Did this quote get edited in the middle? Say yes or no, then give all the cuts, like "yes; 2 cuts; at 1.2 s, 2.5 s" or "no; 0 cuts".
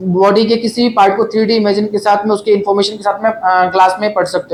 no; 0 cuts